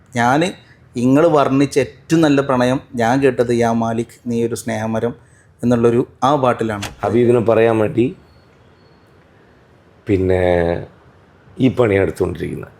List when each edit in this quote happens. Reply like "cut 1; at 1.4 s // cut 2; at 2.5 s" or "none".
cut 1; at 6.9 s